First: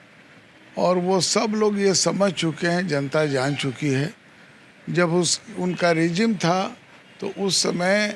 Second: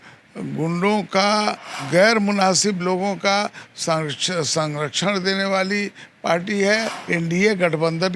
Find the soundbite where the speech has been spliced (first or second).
second